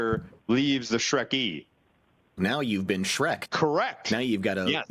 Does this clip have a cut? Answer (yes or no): yes